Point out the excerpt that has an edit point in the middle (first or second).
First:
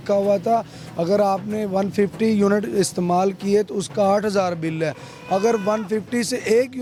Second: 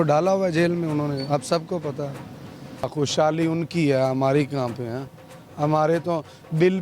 second